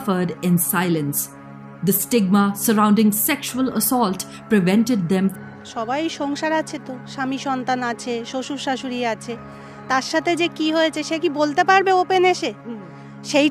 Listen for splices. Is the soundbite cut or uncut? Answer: cut